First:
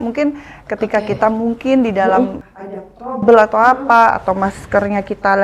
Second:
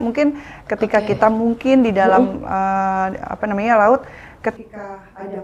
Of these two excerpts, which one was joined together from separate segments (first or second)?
first